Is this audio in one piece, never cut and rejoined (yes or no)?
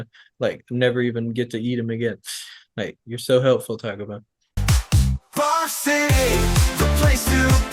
no